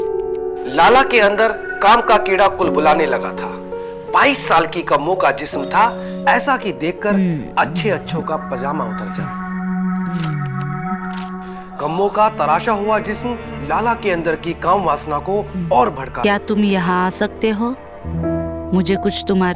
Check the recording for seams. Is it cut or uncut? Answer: cut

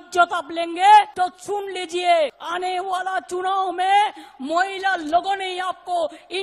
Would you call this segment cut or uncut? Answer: cut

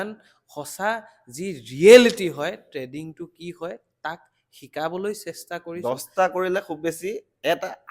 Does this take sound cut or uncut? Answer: cut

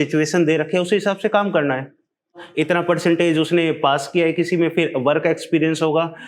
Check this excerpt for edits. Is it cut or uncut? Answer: cut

